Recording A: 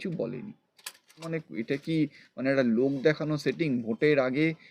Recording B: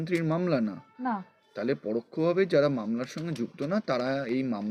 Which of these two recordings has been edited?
A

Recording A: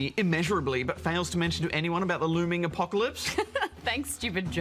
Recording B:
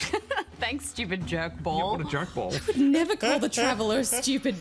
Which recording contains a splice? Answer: B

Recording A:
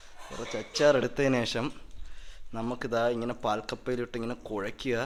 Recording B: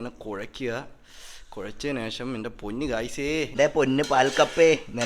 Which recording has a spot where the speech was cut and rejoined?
B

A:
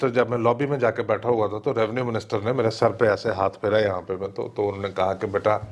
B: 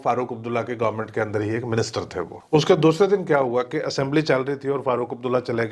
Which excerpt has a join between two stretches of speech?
B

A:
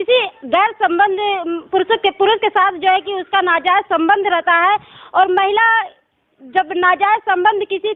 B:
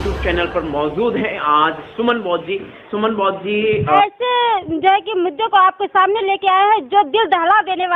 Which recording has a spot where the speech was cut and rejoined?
B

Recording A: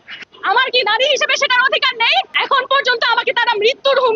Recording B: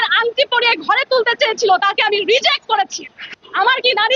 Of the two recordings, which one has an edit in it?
A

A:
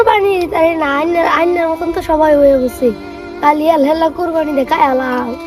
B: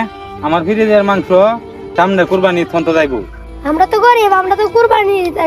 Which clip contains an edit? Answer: B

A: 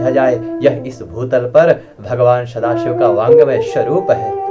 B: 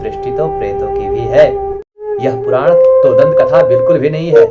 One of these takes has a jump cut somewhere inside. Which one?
B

